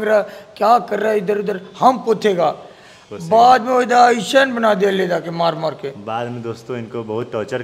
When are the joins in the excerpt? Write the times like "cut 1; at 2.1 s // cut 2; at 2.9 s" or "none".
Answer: none